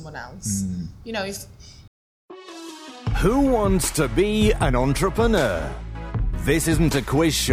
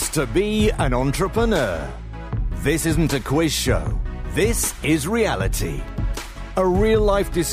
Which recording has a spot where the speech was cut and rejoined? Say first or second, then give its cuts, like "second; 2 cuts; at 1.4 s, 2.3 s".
first; 1 cut; at 1.7 s